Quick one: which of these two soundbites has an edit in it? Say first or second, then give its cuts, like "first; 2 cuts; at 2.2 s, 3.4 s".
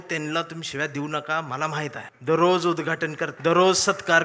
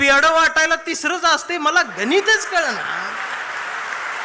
first; 2 cuts; at 2.1 s, 3.3 s